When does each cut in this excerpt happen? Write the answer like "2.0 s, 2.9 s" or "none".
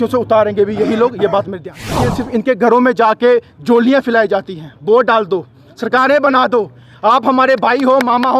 2.2 s